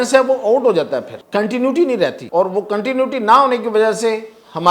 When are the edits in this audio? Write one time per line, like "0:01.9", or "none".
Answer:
0:01.2
0:02.2